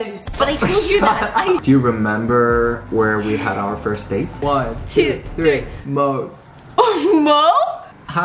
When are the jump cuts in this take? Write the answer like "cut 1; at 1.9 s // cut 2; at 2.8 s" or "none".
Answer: cut 1; at 1.6 s // cut 2; at 4.3 s